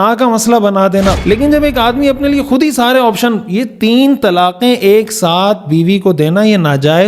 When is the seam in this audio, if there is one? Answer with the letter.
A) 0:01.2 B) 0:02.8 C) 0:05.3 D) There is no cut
A